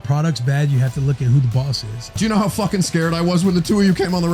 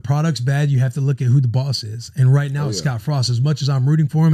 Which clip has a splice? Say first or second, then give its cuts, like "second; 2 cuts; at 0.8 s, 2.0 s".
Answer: first; 1 cut; at 2.1 s